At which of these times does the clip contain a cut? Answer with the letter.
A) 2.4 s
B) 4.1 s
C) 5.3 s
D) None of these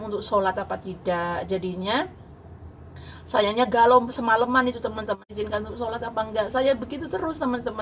C